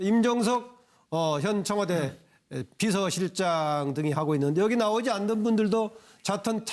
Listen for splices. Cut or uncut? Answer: cut